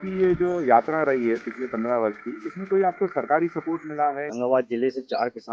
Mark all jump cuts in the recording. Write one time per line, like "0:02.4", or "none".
0:04.3